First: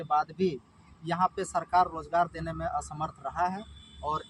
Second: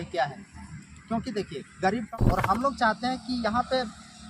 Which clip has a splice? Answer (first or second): second